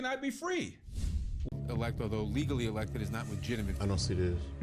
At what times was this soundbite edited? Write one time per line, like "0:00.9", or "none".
0:01.6